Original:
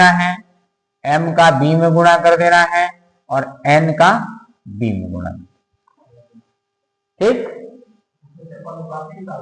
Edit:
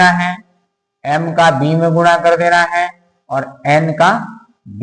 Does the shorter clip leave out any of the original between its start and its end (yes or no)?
no